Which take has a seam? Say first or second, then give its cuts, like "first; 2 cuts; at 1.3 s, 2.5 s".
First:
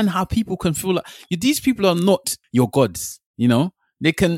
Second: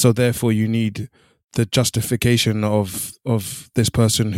first; 1 cut; at 2.4 s